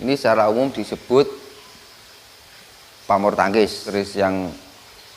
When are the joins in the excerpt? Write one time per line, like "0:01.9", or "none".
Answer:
0:03.9